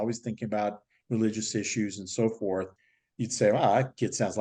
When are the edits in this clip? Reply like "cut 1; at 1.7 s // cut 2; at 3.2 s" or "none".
none